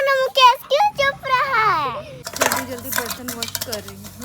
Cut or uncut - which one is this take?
cut